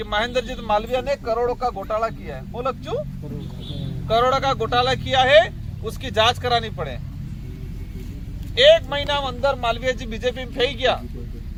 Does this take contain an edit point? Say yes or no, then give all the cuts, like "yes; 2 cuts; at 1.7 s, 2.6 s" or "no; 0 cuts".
no; 0 cuts